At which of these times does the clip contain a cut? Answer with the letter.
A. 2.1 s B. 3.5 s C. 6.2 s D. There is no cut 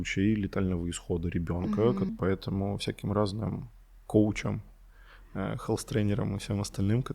A